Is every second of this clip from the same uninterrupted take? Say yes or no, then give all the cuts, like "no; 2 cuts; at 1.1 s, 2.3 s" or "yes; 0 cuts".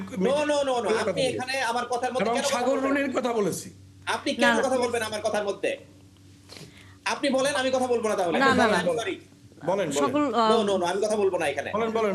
yes; 0 cuts